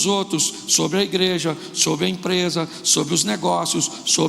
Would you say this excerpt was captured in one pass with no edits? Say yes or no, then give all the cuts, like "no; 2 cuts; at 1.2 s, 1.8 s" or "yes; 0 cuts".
yes; 0 cuts